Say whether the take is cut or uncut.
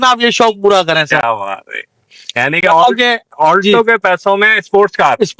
uncut